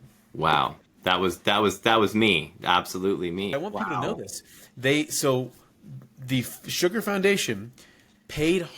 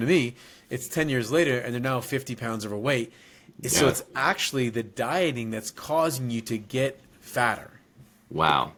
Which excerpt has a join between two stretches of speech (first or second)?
first